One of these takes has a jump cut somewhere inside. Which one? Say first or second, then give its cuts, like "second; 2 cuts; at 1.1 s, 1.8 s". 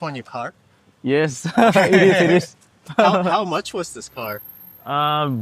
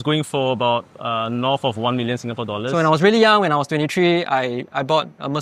second; 1 cut; at 2.7 s